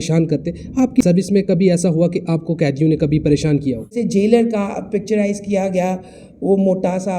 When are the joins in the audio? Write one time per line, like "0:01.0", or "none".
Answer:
0:01.0
0:03.9